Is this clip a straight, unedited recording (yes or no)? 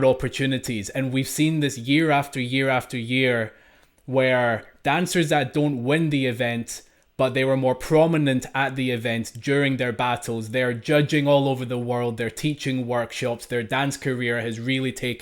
yes